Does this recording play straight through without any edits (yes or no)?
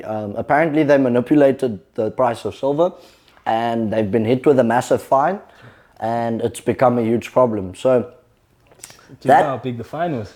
yes